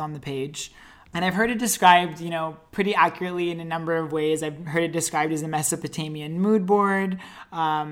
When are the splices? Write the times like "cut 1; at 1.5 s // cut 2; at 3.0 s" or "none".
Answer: none

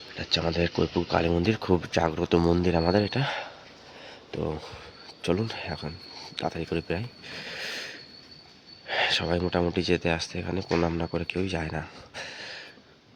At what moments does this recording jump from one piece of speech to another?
none

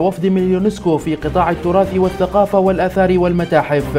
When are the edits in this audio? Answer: none

